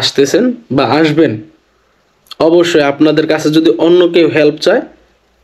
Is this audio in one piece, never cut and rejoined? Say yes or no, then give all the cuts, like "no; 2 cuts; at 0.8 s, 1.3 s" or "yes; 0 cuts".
yes; 0 cuts